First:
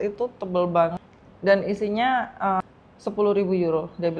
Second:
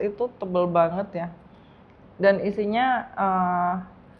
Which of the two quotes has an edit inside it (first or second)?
first